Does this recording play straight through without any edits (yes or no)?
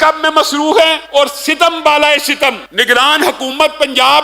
no